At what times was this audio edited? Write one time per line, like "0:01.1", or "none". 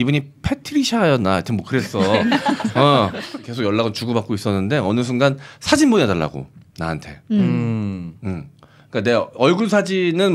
0:03.3

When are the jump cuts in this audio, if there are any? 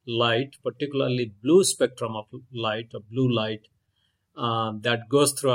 none

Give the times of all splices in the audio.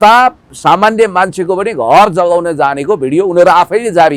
none

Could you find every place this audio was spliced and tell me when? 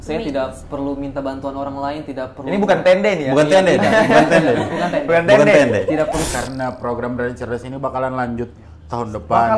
0:06.2

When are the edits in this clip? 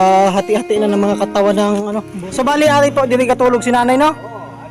0:02.1

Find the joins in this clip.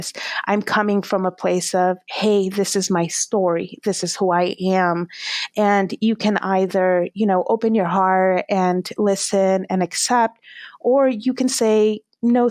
none

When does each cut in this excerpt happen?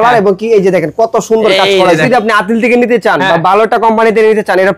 0:02.0

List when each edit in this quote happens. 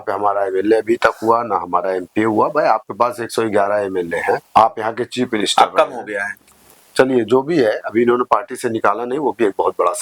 0:04.5

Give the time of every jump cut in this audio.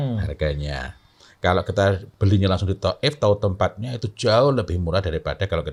none

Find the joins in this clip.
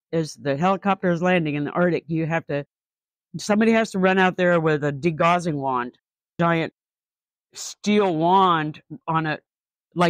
none

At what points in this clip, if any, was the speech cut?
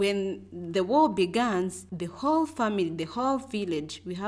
none

